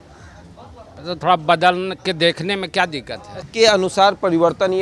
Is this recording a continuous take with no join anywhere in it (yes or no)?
no